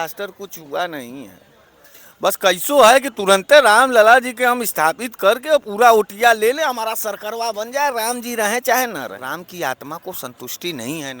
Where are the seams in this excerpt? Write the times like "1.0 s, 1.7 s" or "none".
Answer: 9.2 s